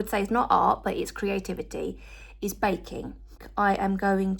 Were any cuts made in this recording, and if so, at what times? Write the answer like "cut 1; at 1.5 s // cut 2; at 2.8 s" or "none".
cut 1; at 3.4 s